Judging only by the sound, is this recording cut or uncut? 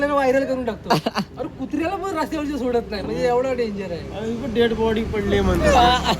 uncut